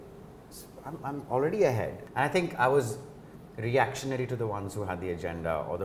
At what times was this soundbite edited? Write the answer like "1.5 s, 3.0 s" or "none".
2.0 s